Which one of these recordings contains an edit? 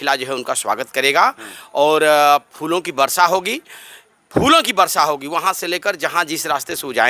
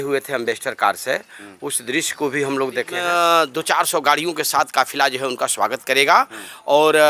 second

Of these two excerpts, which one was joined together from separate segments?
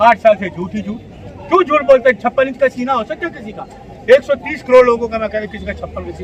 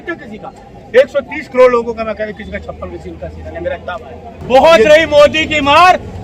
second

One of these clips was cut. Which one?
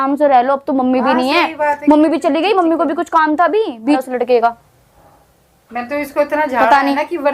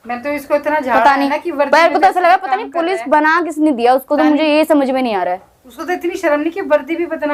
first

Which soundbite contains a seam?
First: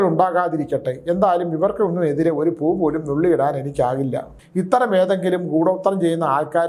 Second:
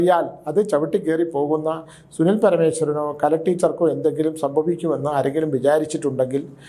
first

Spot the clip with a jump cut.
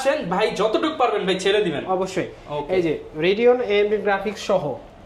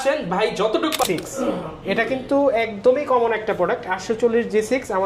second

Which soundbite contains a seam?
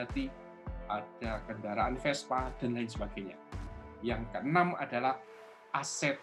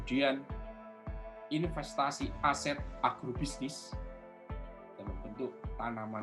second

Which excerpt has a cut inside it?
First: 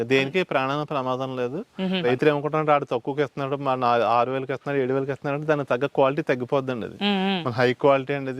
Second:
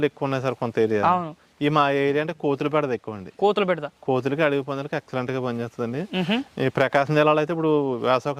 first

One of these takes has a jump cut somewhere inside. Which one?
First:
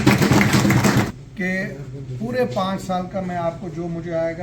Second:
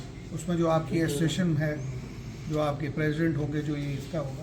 first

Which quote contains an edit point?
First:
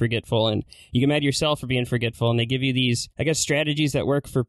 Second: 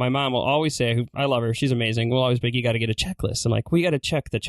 first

